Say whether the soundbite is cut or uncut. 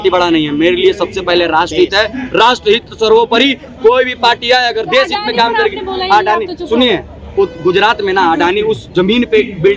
uncut